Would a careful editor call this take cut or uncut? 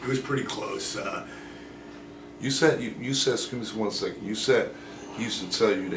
cut